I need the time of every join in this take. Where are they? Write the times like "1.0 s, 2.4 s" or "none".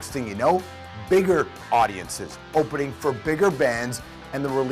none